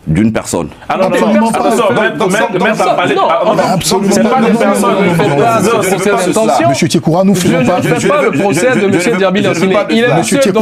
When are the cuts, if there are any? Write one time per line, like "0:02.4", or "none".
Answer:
none